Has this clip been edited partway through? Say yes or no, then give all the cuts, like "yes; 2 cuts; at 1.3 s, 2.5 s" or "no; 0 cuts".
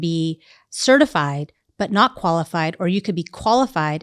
no; 0 cuts